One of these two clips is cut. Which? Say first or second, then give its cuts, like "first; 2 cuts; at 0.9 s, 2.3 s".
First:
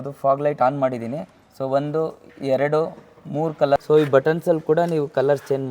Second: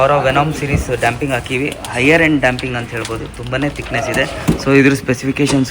first; 1 cut; at 3.8 s